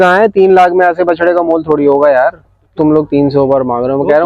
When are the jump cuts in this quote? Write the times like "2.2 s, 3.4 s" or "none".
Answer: 2.8 s